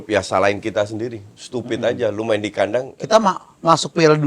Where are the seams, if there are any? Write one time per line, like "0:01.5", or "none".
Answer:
0:02.9

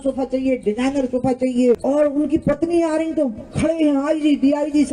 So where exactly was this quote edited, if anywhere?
0:01.8

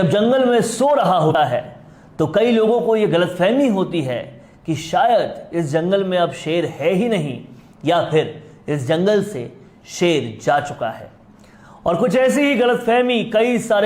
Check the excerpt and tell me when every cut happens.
0:01.3

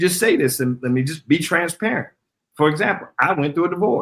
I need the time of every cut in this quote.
none

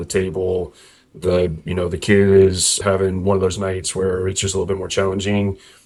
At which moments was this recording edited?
none

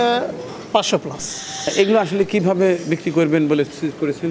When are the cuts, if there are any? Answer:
0:01.7

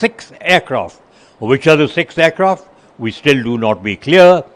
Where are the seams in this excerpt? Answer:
none

